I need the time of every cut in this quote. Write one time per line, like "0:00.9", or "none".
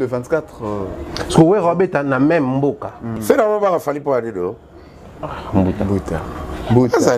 0:03.1